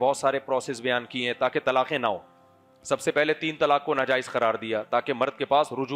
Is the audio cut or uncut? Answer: uncut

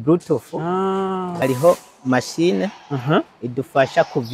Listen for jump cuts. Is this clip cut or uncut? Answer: cut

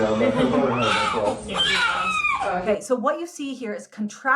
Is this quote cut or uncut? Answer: cut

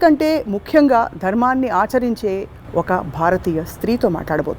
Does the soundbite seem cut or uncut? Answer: uncut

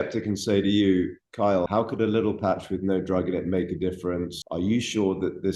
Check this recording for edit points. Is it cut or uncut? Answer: cut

